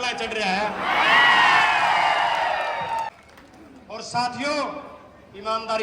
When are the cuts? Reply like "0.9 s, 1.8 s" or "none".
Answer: 3.1 s